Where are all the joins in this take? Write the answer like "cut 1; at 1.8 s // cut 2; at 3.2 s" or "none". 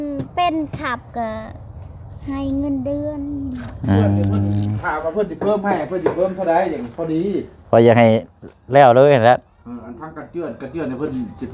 cut 1; at 4.8 s